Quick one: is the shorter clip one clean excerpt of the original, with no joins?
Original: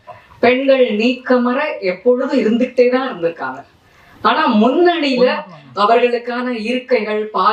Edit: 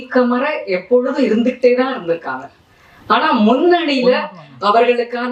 yes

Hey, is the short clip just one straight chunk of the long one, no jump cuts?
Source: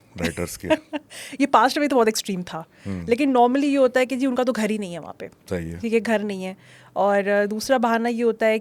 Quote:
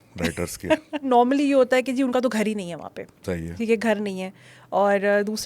no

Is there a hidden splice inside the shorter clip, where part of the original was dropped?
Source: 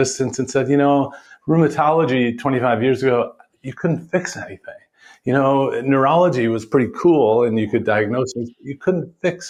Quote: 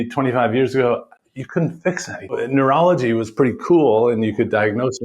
yes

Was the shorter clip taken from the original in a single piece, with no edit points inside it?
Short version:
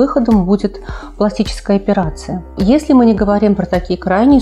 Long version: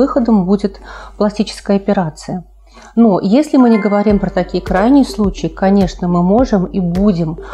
no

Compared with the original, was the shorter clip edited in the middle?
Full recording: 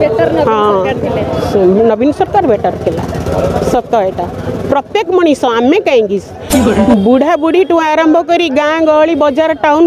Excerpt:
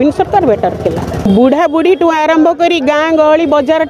yes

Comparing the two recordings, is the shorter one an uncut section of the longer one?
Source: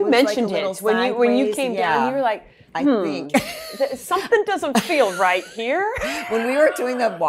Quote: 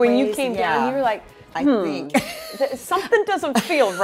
yes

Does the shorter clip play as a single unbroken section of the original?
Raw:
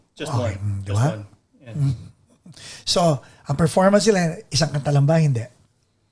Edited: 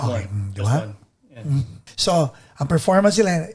no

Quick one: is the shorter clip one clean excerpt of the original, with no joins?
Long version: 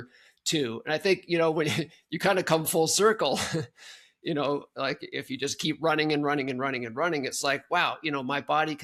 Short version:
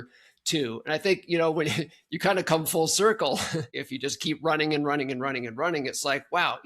no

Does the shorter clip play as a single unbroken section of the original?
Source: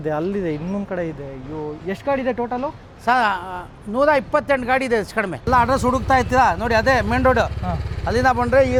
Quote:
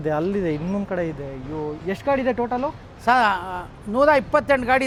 yes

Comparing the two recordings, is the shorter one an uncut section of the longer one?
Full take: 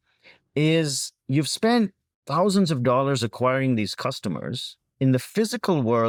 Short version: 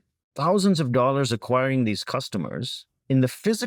yes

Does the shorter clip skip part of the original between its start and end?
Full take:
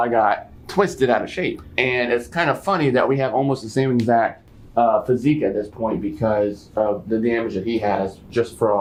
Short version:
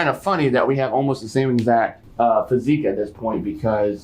yes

